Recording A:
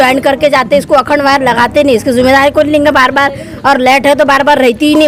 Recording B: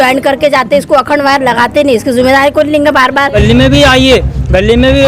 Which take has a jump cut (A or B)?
B